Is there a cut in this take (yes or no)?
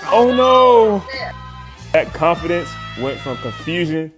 no